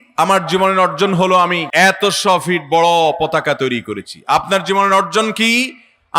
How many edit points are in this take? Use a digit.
1